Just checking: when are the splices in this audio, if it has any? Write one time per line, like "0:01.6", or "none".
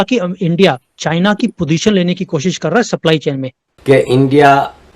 0:03.7